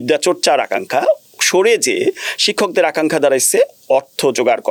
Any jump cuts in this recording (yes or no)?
no